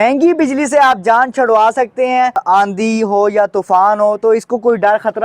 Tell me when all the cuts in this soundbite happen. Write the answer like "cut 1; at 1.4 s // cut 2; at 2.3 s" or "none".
cut 1; at 2.4 s